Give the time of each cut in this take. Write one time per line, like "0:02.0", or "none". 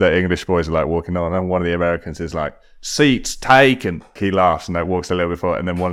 0:04.2

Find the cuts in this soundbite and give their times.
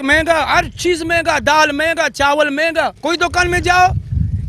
0:03.0

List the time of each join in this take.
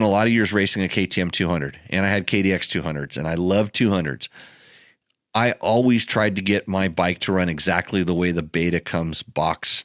none

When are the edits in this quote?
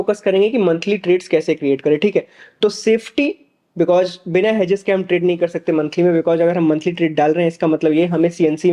none

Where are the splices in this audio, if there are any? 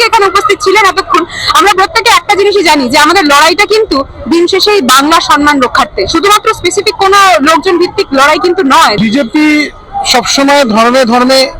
0:08.9

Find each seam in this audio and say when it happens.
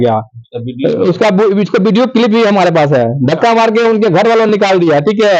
none

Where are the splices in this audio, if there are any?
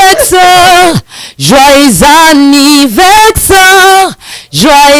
none

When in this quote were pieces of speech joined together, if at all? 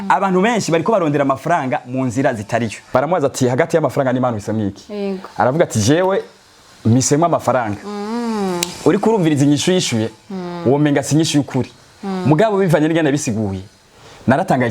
0:02.8

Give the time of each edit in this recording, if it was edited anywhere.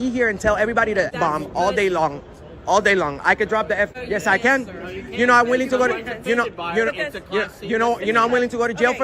0:01.1
0:04.0

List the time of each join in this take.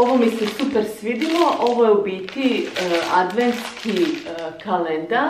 none

